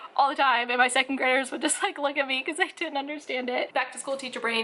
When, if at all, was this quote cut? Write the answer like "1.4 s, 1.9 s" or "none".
3.7 s